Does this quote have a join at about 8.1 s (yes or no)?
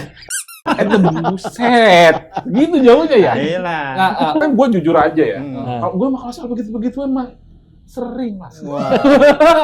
no